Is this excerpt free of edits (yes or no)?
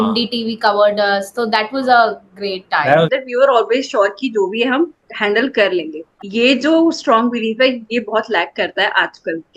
no